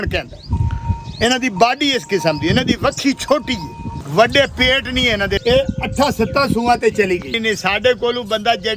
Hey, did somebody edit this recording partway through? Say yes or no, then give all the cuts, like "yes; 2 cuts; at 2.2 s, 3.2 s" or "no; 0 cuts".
yes; 3 cuts; at 3.9 s, 5.4 s, 7.3 s